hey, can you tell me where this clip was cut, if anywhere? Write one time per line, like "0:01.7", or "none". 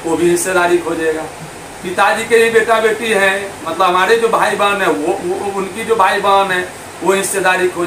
none